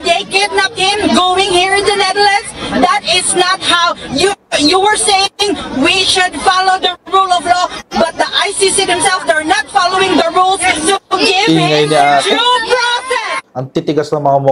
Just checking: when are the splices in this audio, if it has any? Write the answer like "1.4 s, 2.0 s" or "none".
13.4 s

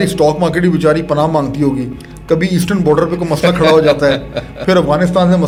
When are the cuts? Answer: none

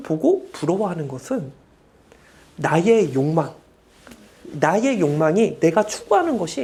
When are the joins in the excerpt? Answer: none

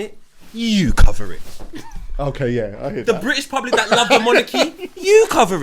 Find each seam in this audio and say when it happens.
none

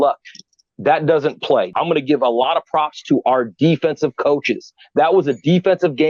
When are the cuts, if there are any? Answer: 1.7 s

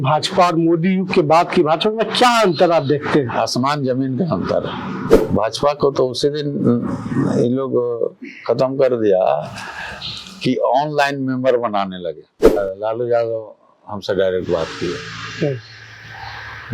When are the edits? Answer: 5.1 s, 12.5 s

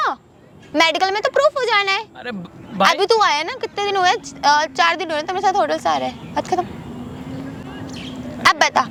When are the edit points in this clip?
none

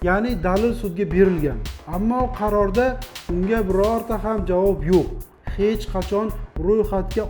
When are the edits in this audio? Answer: 5.3 s

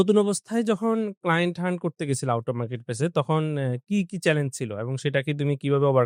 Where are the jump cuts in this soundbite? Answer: none

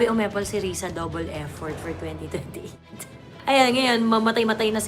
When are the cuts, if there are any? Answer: 3.4 s

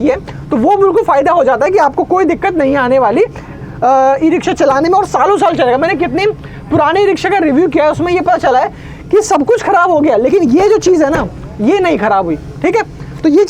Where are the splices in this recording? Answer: none

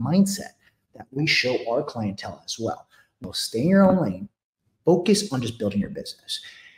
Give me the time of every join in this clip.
3.2 s

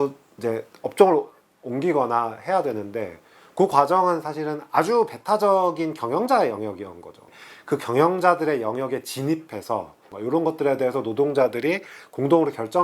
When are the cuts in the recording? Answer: 10.1 s

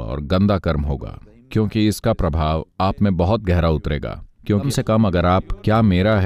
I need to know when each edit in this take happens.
4.6 s

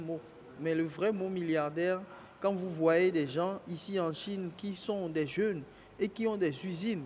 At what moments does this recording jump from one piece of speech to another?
none

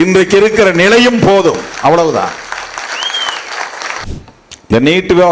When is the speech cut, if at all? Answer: 4.0 s

